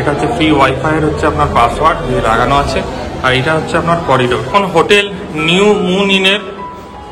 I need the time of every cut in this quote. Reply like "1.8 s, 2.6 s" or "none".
4.5 s